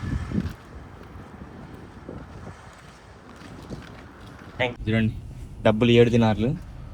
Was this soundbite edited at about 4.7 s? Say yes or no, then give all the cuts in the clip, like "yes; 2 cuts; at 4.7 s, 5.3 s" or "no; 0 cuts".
yes; 1 cut; at 4.7 s